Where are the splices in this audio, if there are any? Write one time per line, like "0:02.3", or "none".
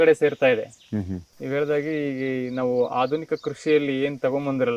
none